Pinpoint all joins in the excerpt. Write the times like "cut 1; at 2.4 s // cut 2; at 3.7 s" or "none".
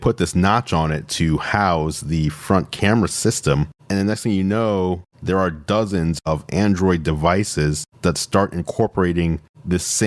cut 1; at 3.8 s // cut 2; at 6.2 s